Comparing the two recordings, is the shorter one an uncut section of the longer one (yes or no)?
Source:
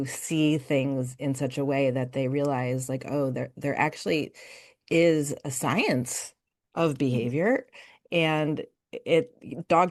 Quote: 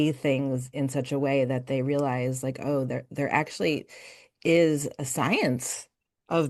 yes